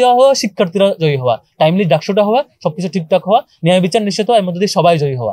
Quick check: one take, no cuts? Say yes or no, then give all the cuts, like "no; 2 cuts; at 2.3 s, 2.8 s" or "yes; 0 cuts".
yes; 0 cuts